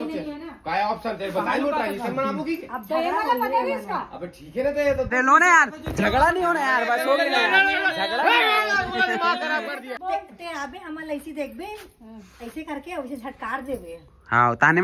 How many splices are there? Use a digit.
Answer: 2